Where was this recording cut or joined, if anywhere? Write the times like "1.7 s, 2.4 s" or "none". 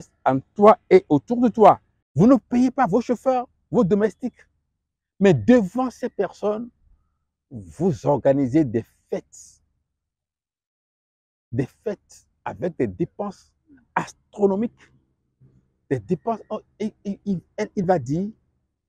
2.0 s